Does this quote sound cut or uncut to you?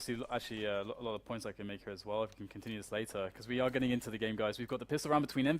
cut